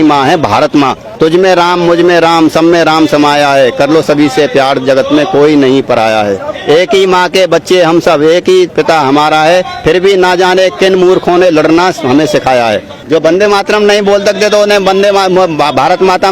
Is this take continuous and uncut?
no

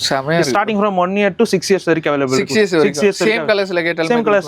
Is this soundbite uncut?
yes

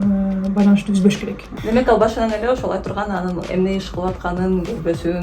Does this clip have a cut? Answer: yes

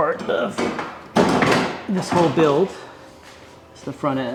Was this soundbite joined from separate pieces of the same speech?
no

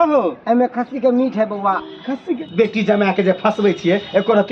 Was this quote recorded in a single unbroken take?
no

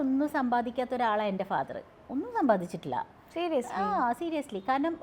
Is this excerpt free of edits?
yes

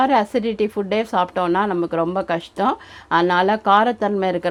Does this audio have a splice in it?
no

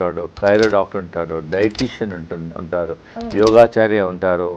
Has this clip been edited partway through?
no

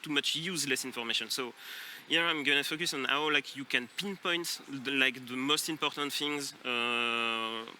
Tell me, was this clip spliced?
no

